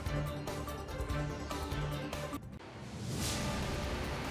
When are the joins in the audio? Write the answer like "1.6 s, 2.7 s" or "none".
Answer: none